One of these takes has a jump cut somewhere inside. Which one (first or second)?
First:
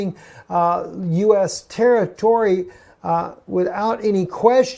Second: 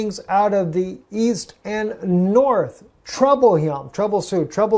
second